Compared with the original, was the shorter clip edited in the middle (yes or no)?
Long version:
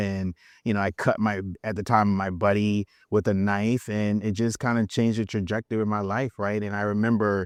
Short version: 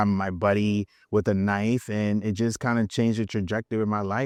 no